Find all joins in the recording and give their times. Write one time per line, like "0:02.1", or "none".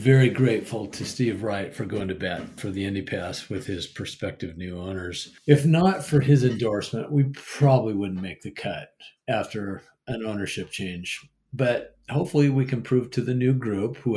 0:02.6
0:05.3